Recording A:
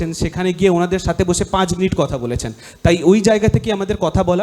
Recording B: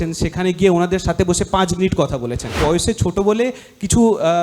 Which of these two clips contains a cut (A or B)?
B